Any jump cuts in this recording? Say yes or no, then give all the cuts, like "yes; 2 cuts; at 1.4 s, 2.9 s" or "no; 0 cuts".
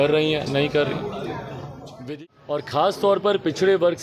yes; 1 cut; at 1.8 s